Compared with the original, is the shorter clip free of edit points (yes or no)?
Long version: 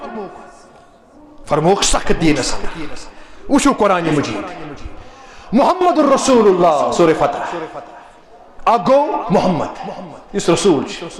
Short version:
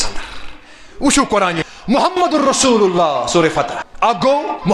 no